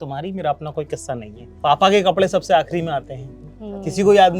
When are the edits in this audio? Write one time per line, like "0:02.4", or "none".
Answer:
0:01.4